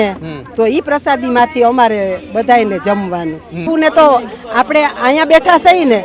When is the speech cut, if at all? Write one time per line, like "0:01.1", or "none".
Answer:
0:03.6